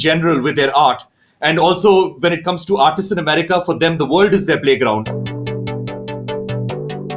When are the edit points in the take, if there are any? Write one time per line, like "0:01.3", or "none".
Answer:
0:05.2

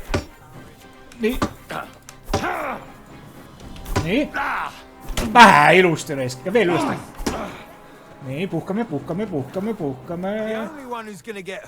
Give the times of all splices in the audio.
0:10.8

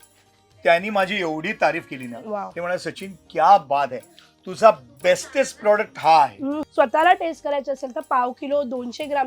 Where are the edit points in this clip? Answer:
0:06.6

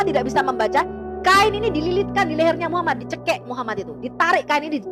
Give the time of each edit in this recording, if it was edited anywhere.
none

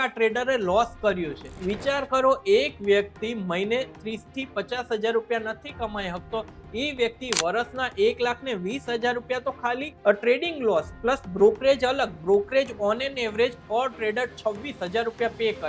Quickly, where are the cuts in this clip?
0:01.5
0:09.9

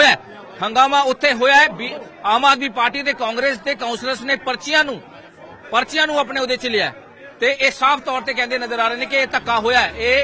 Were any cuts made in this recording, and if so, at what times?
none

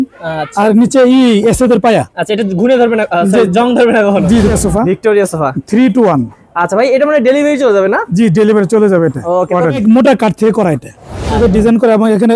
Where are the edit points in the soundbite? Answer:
0:04.5
0:09.8
0:11.3

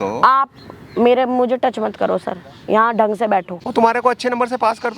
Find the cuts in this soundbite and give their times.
0:03.6

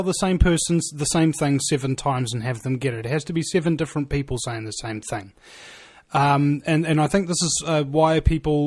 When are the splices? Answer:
0:01.6

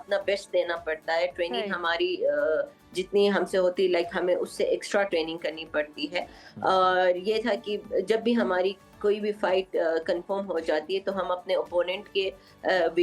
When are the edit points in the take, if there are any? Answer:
none

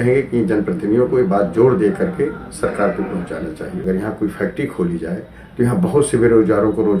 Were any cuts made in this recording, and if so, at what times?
0:03.8

